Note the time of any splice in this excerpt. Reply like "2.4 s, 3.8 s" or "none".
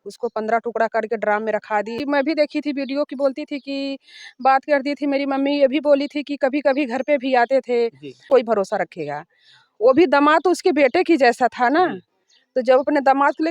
2.0 s, 8.2 s